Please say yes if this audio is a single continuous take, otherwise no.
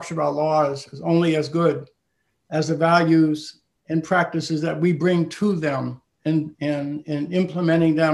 yes